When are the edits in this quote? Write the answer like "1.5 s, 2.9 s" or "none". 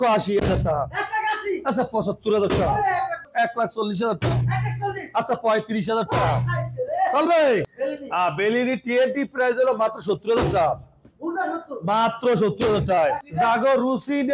3.3 s, 7.7 s, 13.2 s